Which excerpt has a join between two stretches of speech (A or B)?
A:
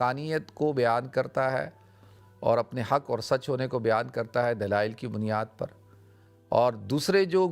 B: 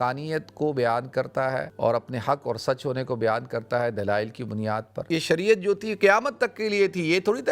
B